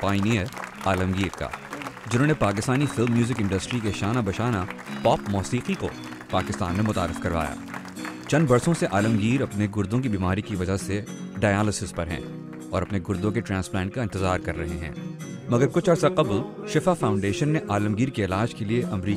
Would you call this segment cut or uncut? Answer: uncut